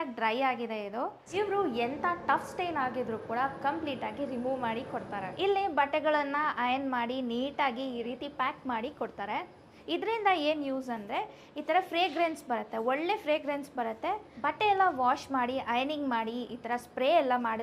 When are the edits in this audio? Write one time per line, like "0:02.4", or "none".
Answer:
0:01.3
0:05.3
0:09.7
0:14.3